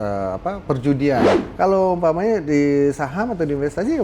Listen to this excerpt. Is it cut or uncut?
cut